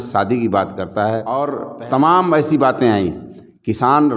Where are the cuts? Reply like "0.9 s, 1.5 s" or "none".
1.4 s